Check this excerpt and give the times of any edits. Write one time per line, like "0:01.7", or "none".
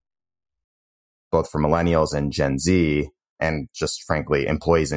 0:01.3
0:03.4